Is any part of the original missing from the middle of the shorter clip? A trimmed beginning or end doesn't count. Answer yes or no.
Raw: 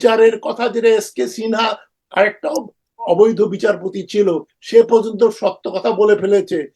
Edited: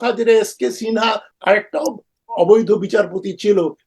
yes